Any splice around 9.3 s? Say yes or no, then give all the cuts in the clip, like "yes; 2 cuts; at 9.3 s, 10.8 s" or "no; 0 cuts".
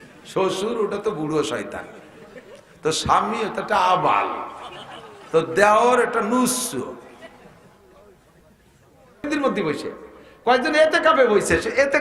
yes; 1 cut; at 9.3 s